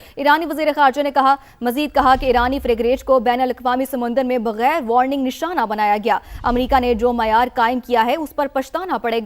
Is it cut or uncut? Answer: uncut